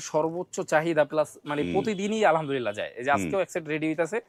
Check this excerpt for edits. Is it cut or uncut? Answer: uncut